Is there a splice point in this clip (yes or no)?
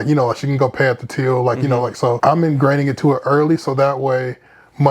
yes